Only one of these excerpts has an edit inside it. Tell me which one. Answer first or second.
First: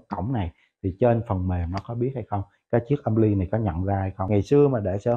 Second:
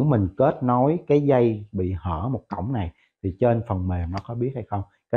first